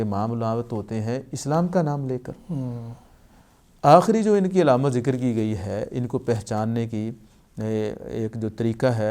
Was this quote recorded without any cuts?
yes; 0 cuts

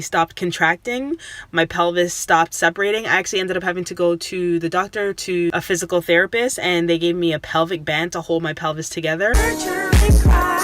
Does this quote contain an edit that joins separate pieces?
yes; 2 cuts; at 5.5 s, 9.4 s

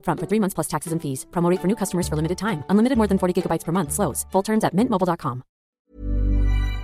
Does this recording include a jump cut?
yes; 1 cut; at 5.8 s

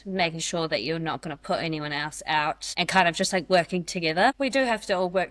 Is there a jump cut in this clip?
yes; 1 cut; at 4.4 s

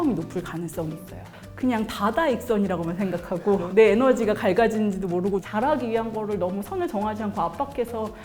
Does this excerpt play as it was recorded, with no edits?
no; 2 cuts; at 1.4 s, 5.5 s

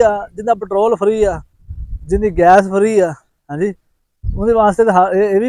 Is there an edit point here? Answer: no; 0 cuts

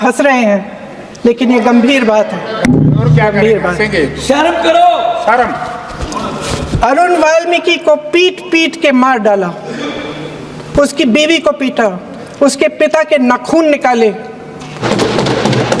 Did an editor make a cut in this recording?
yes; 1 cut; at 14.8 s

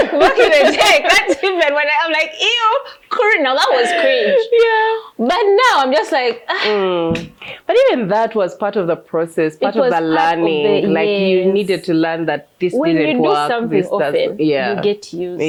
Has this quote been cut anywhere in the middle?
no; 0 cuts

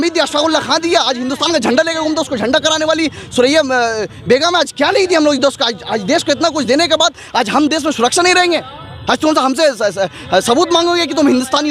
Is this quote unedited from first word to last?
yes; 0 cuts

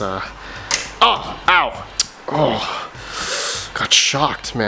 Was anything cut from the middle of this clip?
no; 0 cuts

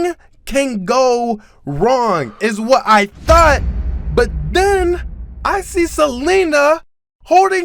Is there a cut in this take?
no; 0 cuts

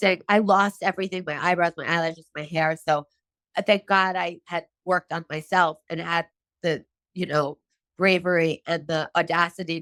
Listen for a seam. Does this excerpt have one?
no; 0 cuts

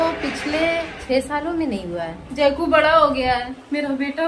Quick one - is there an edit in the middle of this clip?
yes; 2 cuts; at 1.0 s, 2.2 s

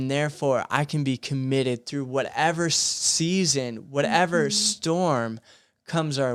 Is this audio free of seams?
yes; 0 cuts

